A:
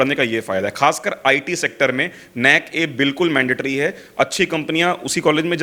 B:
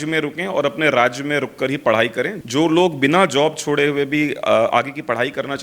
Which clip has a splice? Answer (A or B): B